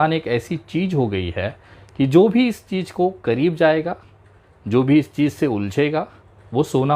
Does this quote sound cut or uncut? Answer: uncut